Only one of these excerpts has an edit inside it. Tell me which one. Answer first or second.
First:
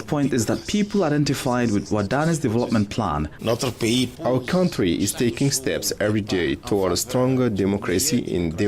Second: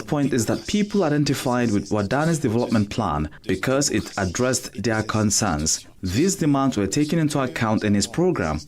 first